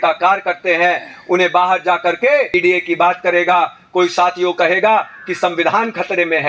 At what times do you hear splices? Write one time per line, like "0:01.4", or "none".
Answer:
0:02.5